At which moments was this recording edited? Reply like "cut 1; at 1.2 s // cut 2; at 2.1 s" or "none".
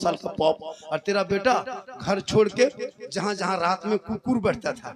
none

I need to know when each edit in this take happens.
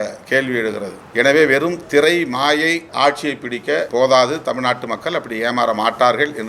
cut 1; at 1.0 s // cut 2; at 2.9 s // cut 3; at 3.9 s

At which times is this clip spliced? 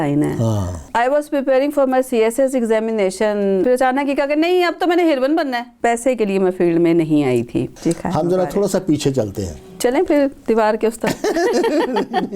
cut 1; at 0.8 s // cut 2; at 3.6 s // cut 3; at 5.7 s // cut 4; at 7.7 s // cut 5; at 9.7 s

